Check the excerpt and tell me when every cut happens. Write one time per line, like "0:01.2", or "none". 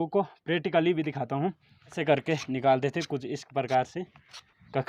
0:01.9

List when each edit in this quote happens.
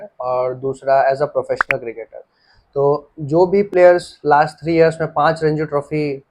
none

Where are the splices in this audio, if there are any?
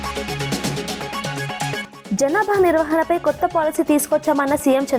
0:01.7

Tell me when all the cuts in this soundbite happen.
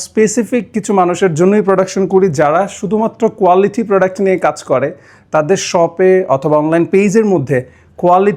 none

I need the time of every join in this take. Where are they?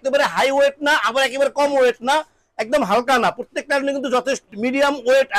0:04.5

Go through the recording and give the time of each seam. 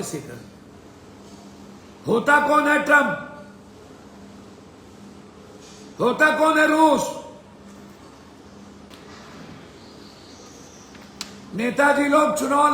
0:08.9

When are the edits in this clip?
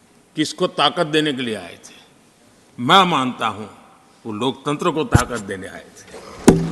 none

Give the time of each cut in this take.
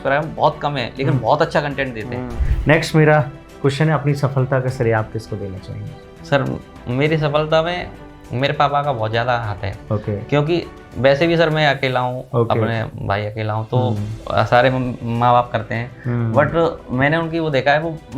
0:02.3

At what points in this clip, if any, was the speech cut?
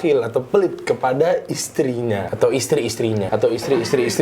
0:02.3
0:03.3

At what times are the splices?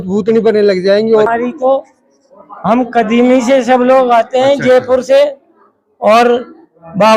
0:01.3

